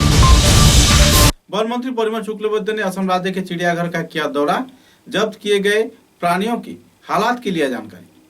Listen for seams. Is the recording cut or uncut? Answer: cut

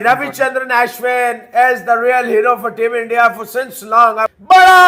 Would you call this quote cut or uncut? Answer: uncut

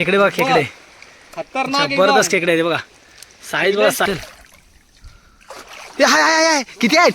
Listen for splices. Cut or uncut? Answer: cut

